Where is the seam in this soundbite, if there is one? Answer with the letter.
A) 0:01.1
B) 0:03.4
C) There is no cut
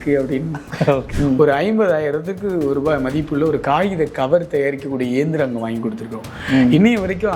A